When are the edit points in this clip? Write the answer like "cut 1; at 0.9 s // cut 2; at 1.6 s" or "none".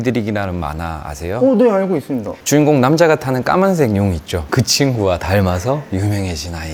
none